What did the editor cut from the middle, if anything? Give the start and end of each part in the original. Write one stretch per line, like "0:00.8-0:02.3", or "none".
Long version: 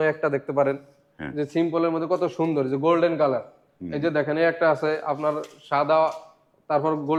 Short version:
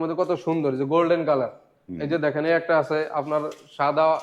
none